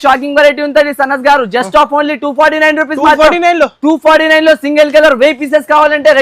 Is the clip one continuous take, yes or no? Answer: yes